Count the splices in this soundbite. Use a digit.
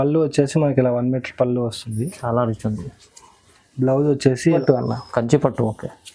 1